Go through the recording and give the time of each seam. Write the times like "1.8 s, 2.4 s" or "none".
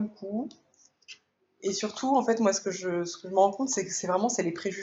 none